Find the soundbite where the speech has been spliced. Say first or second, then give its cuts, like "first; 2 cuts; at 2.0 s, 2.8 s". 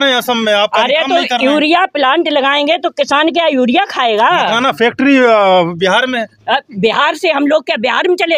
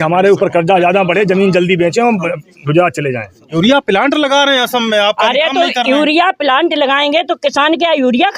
second; 1 cut; at 3.5 s